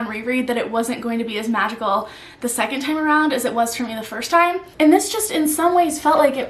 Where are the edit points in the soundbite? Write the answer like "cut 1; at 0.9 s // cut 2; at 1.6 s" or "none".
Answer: cut 1; at 4.6 s